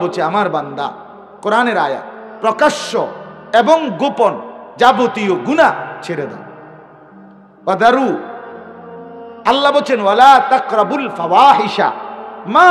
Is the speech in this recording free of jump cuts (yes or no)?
yes